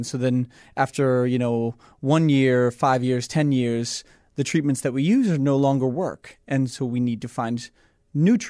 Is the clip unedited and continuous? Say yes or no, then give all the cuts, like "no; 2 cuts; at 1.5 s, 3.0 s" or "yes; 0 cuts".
yes; 0 cuts